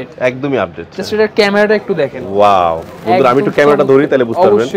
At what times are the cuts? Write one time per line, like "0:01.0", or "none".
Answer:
none

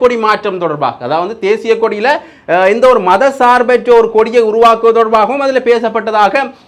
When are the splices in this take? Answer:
none

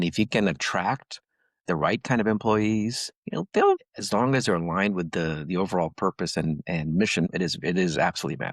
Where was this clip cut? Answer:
0:03.8
0:07.3

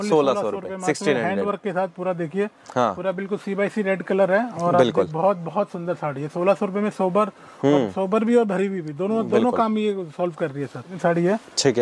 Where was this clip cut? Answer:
0:10.9

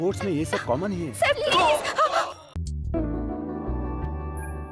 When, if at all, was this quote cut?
0:02.5

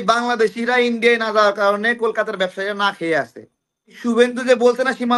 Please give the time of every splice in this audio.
0:04.0

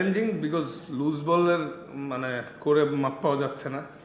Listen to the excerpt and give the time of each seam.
none

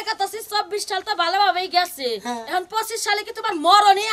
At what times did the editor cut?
none

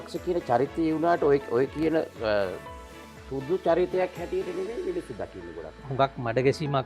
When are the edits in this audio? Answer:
0:05.8

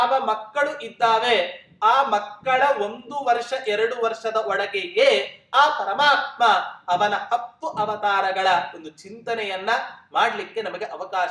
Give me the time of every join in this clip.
none

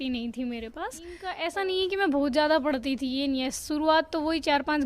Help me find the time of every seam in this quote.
0:01.3

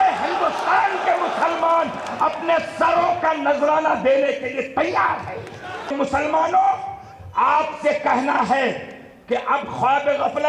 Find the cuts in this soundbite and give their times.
0:05.9

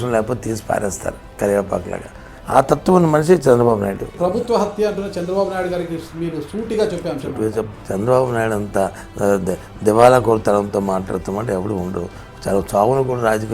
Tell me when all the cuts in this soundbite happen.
0:04.1
0:07.7

